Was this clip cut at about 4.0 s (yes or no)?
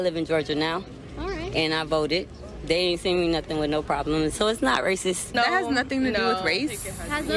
no